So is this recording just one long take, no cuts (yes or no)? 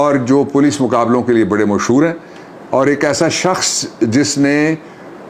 yes